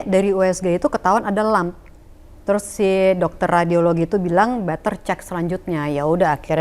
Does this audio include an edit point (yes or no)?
no